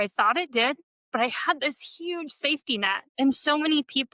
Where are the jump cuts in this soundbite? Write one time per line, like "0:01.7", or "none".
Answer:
0:00.9
0:03.1